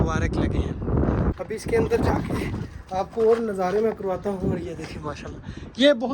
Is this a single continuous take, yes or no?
no